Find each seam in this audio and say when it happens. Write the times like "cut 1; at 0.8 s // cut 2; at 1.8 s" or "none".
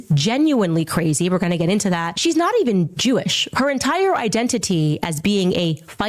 cut 1; at 2.1 s